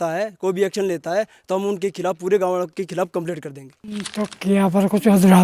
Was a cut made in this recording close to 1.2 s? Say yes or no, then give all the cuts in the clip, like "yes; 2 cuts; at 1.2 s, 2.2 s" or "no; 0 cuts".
no; 1 cut; at 4.1 s